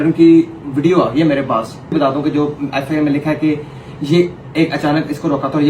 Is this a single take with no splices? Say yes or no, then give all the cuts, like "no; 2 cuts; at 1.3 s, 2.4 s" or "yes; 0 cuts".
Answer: no; 1 cut; at 1.9 s